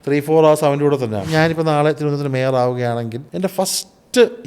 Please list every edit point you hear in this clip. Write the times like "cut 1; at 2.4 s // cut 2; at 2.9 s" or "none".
cut 1; at 1.2 s // cut 2; at 3.2 s